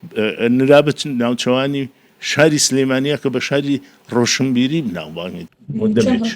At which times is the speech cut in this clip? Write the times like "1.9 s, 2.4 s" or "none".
none